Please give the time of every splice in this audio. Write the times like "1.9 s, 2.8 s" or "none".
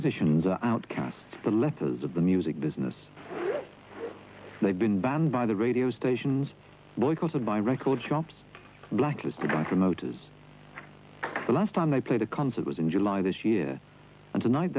5.5 s